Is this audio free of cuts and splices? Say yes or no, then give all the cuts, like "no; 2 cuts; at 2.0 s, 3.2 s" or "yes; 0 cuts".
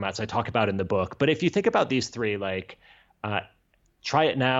yes; 0 cuts